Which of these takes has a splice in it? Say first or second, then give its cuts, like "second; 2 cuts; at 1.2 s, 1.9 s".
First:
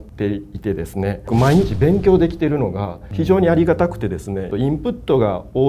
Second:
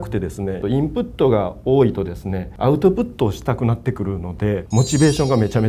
second; 1 cut; at 4.6 s